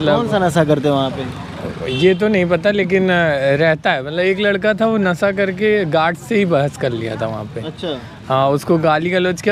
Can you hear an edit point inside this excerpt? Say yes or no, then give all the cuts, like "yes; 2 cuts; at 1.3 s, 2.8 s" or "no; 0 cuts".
no; 0 cuts